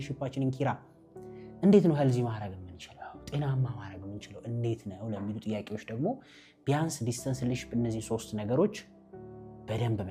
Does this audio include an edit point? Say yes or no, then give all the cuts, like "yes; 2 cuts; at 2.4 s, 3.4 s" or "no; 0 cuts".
no; 0 cuts